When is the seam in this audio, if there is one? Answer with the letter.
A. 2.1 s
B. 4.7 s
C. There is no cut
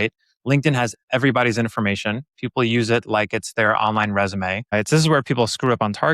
B